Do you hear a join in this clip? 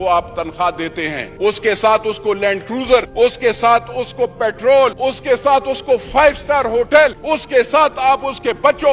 yes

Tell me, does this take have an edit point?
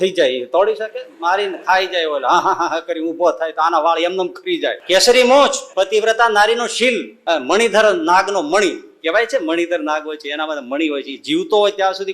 yes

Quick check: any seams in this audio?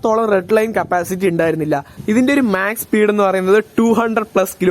yes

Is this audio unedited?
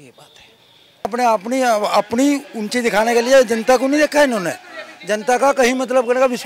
no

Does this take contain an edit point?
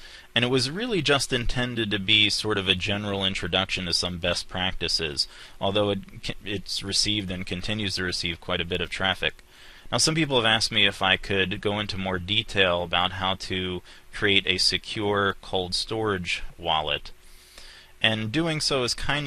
yes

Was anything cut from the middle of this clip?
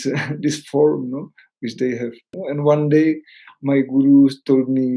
yes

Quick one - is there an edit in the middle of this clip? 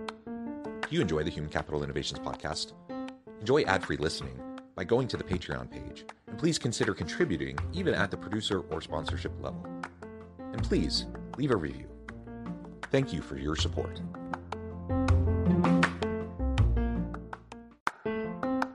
yes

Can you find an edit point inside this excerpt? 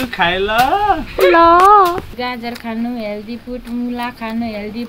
yes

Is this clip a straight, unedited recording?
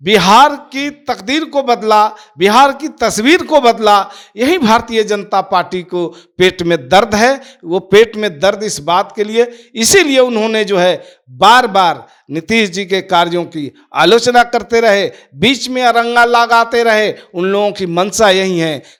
yes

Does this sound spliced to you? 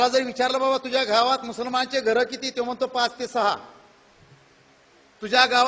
no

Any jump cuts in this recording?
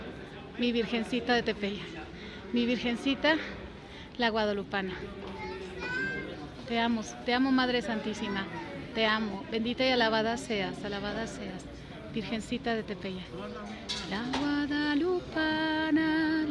no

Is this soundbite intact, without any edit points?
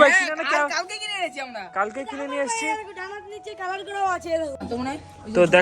no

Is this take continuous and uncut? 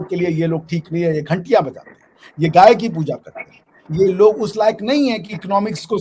yes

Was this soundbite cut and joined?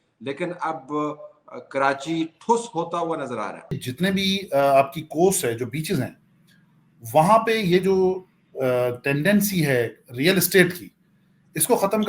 yes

